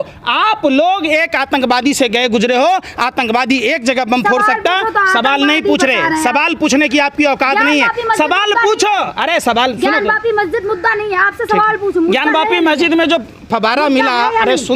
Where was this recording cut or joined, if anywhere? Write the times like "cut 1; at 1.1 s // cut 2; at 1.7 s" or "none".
none